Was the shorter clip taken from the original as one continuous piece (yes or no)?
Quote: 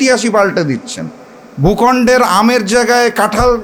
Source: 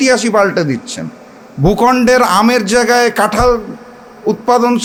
yes